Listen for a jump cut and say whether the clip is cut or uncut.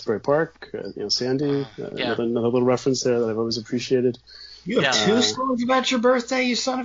uncut